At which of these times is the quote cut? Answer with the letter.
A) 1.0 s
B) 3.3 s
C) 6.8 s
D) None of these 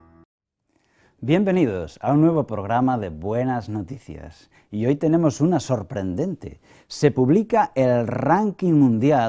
D